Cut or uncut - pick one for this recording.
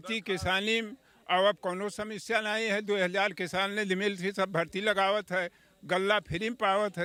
uncut